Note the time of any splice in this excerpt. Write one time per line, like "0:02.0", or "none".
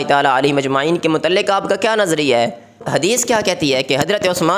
0:02.8